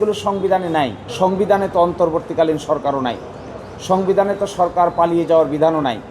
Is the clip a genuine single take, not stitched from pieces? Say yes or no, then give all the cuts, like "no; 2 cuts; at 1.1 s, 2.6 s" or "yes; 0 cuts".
no; 1 cut; at 1.0 s